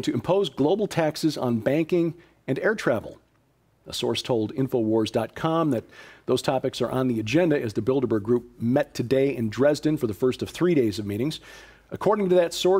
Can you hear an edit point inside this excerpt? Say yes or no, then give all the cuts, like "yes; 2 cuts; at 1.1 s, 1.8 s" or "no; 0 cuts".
yes; 1 cut; at 3.1 s